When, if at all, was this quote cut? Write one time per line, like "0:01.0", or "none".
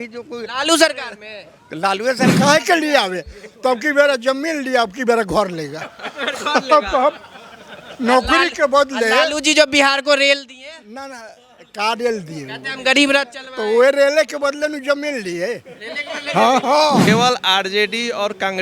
0:02.3
0:17.1